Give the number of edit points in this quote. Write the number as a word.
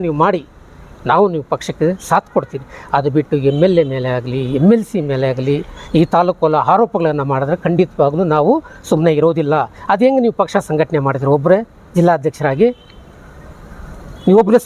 zero